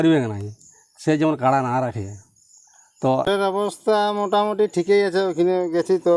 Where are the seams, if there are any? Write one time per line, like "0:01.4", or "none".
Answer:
0:03.2